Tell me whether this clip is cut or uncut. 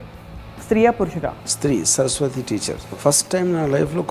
cut